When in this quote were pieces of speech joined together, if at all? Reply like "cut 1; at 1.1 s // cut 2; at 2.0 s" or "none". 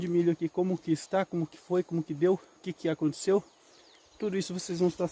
none